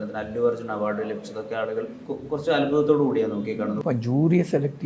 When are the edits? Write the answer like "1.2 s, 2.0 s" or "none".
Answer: 2.1 s, 3.8 s